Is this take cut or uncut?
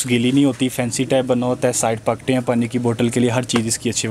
uncut